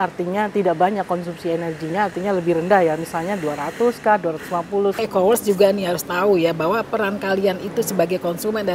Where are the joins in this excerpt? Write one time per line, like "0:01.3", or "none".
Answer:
0:05.0